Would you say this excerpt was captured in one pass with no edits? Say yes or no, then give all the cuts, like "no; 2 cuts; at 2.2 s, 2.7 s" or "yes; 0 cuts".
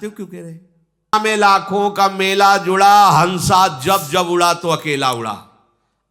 no; 1 cut; at 1.0 s